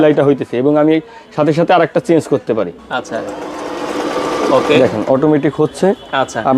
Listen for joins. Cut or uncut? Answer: cut